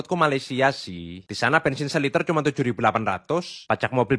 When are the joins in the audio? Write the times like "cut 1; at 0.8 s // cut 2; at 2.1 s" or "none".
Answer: none